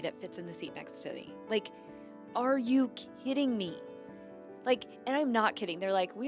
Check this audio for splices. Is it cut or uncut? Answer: uncut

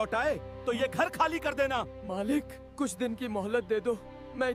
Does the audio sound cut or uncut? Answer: uncut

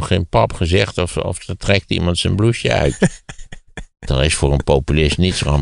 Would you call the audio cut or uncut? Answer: cut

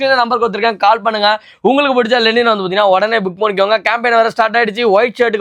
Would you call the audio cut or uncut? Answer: uncut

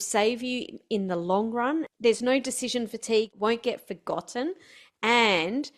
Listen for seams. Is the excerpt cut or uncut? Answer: cut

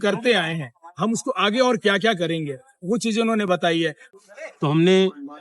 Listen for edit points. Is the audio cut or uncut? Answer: cut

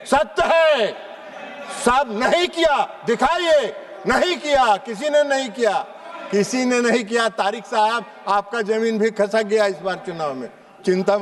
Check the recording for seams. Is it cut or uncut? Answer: uncut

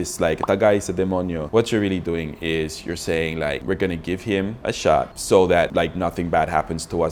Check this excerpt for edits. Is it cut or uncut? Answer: uncut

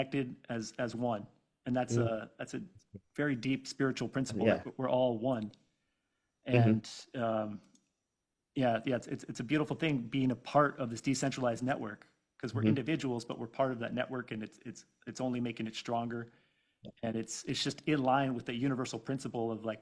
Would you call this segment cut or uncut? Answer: uncut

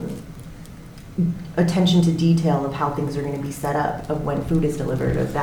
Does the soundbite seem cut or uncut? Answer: uncut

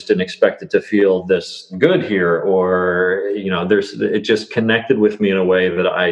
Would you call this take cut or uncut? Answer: cut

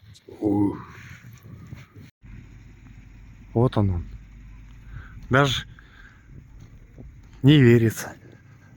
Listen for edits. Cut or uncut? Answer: cut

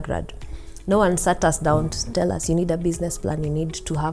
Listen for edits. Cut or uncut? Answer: cut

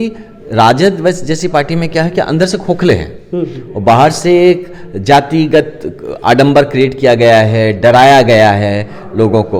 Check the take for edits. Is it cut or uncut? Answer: uncut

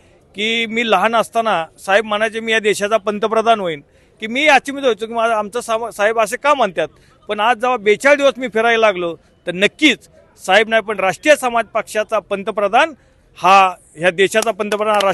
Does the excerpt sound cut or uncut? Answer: uncut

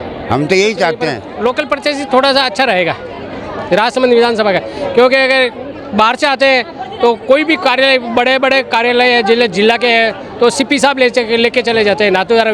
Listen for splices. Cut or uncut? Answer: cut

